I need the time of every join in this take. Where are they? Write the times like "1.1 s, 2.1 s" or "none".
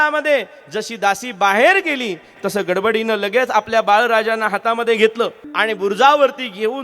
5.4 s